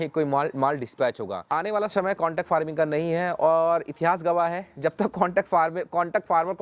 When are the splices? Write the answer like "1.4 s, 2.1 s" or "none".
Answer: 1.5 s